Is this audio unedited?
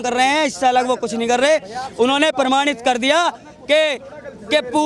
yes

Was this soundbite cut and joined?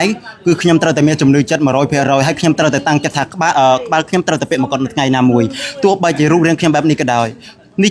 no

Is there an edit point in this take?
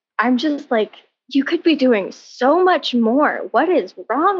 no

